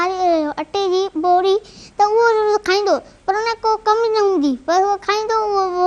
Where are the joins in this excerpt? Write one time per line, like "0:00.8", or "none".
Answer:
none